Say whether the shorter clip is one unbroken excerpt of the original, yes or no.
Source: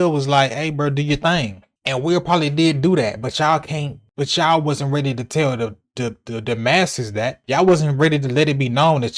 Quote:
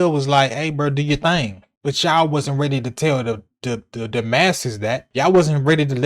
no